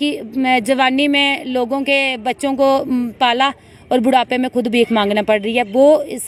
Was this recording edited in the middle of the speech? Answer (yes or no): no